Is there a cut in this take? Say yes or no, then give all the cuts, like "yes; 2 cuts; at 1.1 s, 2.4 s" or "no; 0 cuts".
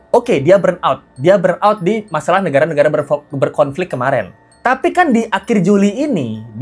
no; 0 cuts